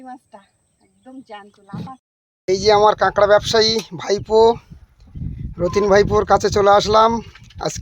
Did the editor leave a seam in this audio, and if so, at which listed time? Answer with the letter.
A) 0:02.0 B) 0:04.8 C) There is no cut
A